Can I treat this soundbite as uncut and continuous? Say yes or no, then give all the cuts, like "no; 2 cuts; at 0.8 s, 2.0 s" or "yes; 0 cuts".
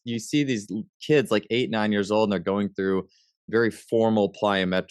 yes; 0 cuts